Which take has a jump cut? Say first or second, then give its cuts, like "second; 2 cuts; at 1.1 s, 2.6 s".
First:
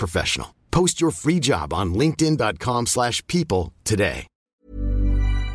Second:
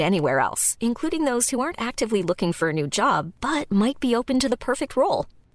first; 1 cut; at 4.6 s